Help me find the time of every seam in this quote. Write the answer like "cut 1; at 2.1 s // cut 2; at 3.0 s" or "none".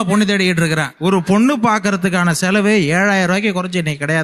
cut 1; at 0.9 s